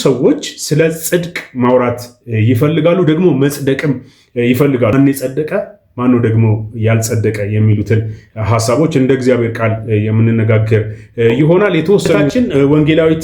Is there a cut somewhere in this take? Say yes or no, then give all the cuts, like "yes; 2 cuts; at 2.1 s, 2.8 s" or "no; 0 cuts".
yes; 2 cuts; at 4.9 s, 12.2 s